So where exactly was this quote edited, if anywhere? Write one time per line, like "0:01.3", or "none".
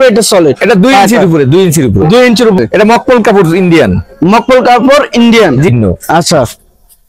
0:02.6
0:05.7